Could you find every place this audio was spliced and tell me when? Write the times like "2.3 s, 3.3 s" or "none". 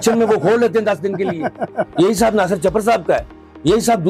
none